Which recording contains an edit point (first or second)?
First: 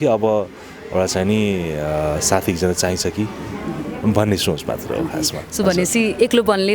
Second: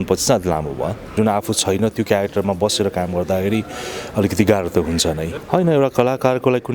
second